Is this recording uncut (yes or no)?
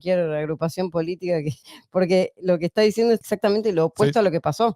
no